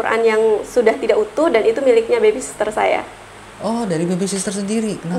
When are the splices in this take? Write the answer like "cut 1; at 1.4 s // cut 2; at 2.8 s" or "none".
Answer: none